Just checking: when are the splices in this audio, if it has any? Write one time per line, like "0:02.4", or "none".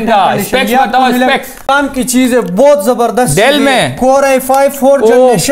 0:01.9